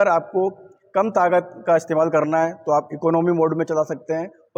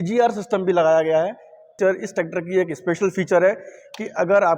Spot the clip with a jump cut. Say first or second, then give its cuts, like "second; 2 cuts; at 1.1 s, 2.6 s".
second; 1 cut; at 1.7 s